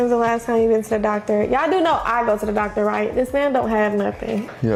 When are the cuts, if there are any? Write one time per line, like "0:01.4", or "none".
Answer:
none